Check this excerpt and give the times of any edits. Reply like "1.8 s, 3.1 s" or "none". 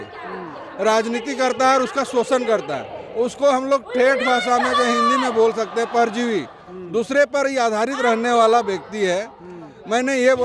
none